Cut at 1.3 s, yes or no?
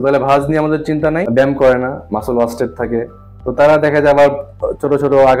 yes